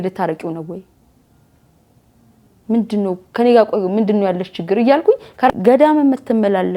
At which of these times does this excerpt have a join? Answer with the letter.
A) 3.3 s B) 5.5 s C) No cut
B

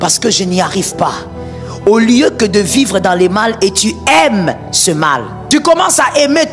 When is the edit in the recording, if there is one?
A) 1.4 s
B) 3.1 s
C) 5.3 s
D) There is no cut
C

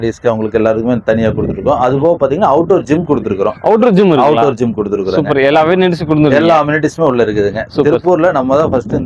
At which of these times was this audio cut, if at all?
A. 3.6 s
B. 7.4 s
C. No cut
C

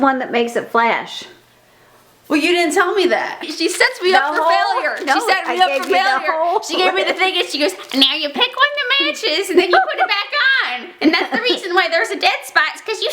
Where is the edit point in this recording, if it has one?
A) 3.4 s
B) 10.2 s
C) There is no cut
A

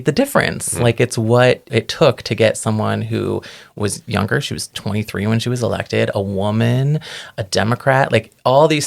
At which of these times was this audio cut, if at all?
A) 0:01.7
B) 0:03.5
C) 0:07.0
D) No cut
A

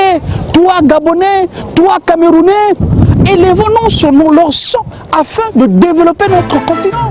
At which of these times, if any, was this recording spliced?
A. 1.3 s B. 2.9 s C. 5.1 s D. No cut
B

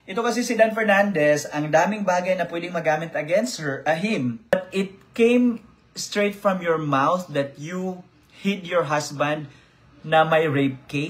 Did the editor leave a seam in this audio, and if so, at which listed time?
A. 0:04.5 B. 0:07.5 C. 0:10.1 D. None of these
A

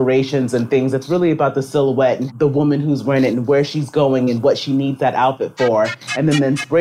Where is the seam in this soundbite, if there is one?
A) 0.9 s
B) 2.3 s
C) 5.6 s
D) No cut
B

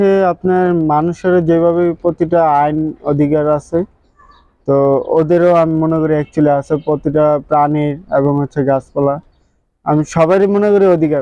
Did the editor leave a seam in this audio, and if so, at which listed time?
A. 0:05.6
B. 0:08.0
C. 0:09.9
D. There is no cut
D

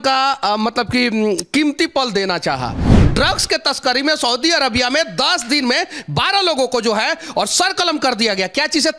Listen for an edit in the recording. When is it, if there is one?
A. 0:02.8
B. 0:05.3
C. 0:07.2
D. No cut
A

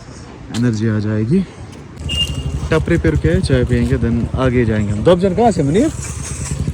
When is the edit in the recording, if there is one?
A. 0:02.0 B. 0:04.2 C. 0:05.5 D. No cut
A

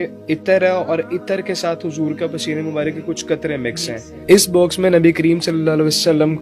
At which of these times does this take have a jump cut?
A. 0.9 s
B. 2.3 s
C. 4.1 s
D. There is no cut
C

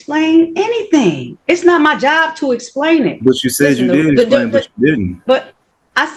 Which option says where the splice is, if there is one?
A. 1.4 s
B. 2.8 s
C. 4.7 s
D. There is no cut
D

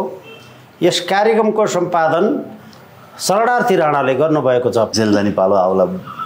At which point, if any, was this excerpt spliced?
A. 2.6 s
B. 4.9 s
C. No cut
B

